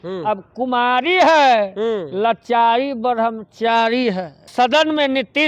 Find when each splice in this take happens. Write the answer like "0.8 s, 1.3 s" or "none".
4.5 s